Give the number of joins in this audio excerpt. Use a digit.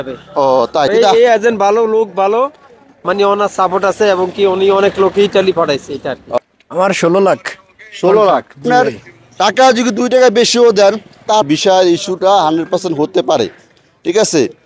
4